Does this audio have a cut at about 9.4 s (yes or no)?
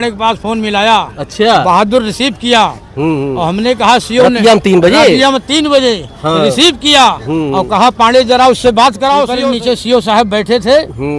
yes